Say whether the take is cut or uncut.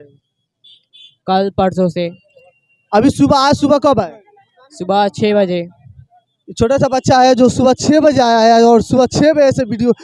uncut